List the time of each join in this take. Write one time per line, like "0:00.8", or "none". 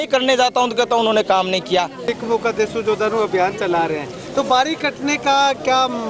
0:02.2

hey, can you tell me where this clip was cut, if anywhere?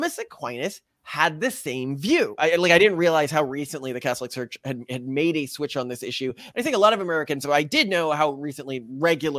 0:02.4

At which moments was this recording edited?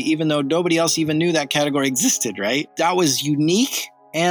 0:02.7

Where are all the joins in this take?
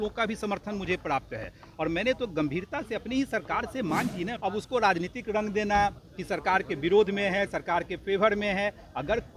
0:04.3
0:07.9

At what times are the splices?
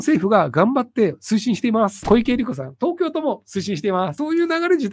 0:02.0
0:04.2

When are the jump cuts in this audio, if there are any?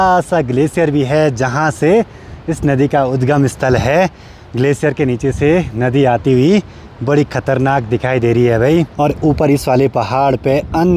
none

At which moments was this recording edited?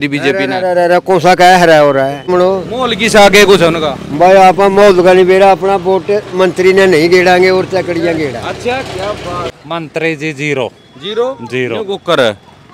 0:02.3
0:09.6

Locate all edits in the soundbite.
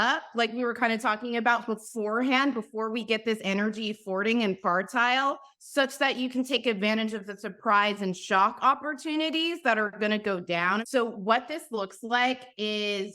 0:10.8

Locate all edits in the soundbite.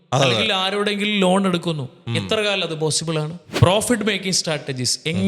0:03.4

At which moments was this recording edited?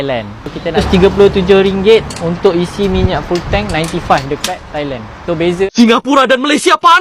0:00.8
0:05.7

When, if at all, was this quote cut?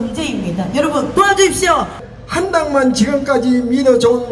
0:02.0

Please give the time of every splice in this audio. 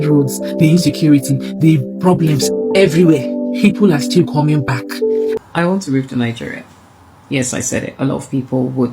0:05.4

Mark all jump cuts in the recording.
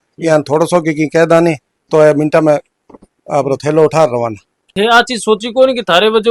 0:01.7
0:04.6

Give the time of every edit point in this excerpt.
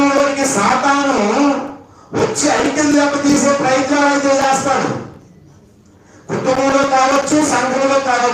none

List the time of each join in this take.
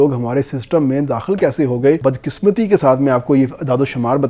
0:02.0

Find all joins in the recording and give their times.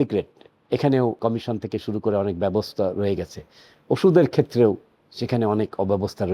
0:01.2

